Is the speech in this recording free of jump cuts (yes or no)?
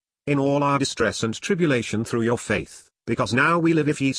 yes